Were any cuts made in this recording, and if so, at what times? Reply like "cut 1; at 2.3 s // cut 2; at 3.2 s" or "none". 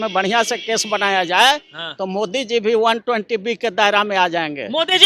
none

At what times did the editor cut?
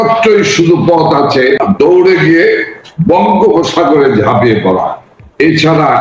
cut 1; at 1.6 s

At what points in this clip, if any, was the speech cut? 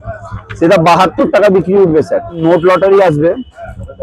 cut 1; at 2.4 s

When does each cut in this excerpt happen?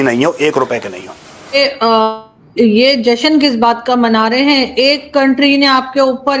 cut 1; at 1.5 s

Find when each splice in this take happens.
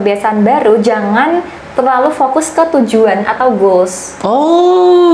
none

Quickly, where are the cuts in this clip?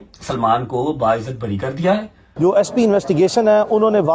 cut 1; at 2.2 s

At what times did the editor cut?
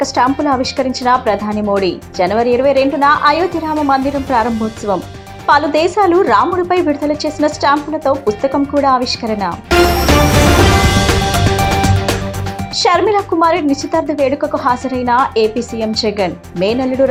none

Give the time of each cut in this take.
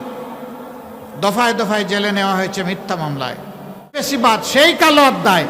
cut 1; at 4.1 s

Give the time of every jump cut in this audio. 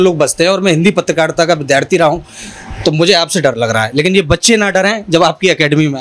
none

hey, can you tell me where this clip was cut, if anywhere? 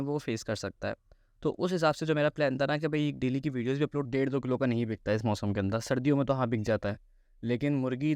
cut 1; at 4.0 s

